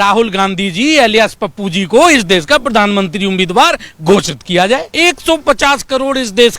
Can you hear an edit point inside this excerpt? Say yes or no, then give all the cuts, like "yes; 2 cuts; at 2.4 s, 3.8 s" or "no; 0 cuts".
yes; 1 cut; at 4.9 s